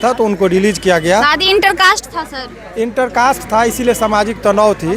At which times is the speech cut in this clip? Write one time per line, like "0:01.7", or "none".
none